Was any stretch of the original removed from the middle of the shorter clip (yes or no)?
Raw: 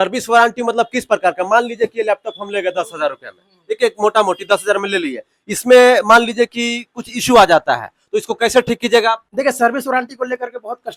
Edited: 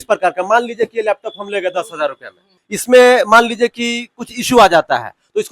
yes